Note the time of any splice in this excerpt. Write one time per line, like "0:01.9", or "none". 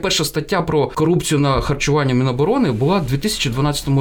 0:00.9